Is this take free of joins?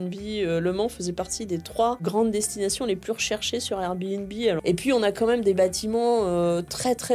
no; 2 cuts; at 2.0 s, 4.6 s

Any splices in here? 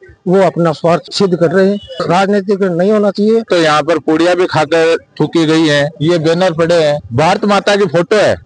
yes; 3 cuts; at 1.9 s, 3.5 s, 7.0 s

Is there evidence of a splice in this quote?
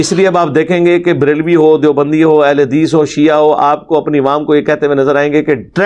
no; 0 cuts

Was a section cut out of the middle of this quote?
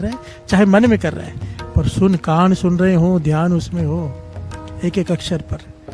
no; 0 cuts

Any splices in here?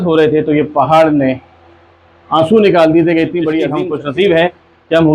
yes; 1 cut; at 3.8 s

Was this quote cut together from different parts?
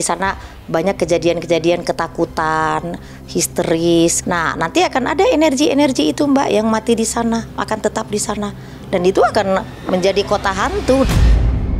yes; 2 cuts; at 4.2 s, 11.1 s

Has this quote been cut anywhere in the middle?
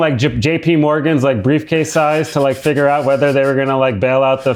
no; 0 cuts

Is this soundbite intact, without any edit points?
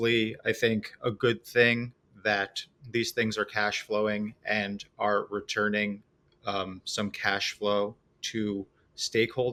yes; 0 cuts

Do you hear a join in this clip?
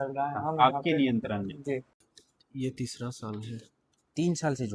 yes; 1 cut; at 1.9 s

